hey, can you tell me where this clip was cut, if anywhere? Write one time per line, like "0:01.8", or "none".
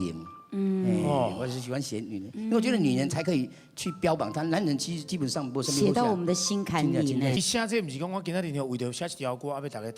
0:07.4